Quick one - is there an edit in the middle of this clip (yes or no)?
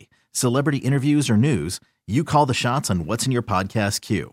no